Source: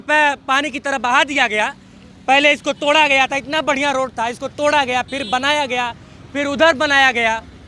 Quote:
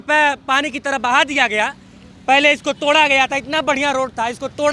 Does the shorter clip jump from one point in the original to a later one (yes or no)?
no